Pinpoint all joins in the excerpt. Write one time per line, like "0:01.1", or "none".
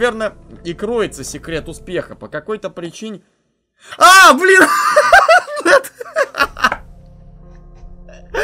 none